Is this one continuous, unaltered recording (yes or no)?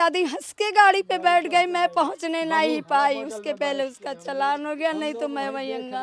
yes